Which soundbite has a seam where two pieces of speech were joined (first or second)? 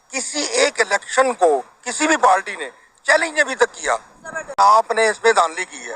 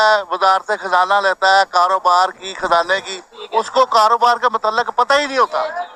first